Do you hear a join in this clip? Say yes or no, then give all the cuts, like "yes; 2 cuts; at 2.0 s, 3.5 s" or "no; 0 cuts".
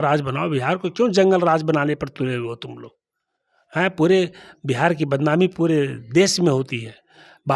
no; 0 cuts